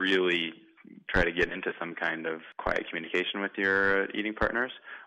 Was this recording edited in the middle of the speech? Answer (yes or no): yes